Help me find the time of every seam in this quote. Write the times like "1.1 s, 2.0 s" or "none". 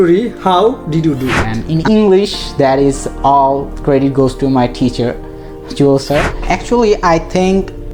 1.5 s, 6.3 s